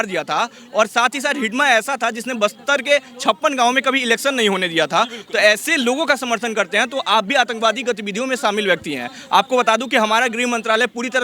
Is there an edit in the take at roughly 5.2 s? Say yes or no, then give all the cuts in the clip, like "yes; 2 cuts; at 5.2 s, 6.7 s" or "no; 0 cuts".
no; 0 cuts